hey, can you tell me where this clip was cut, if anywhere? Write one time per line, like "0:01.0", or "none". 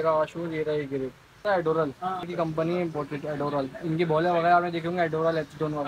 0:01.4
0:02.3

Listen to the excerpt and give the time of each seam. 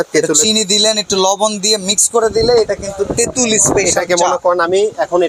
none

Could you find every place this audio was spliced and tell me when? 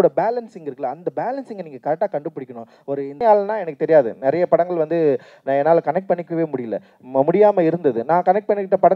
0:03.1

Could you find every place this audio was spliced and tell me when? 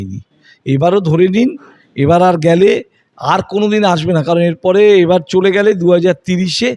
none

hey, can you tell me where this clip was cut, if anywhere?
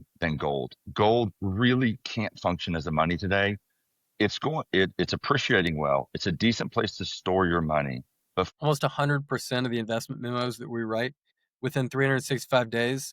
0:08.5

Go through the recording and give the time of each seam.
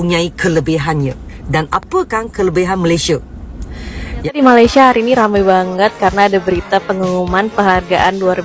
0:04.4

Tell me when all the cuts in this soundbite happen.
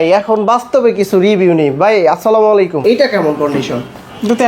0:02.8

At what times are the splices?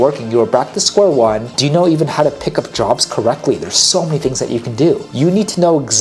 0:01.5
0:05.1

